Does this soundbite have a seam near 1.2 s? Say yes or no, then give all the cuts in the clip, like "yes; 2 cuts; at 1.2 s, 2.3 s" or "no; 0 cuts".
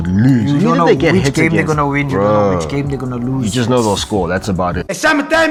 no; 0 cuts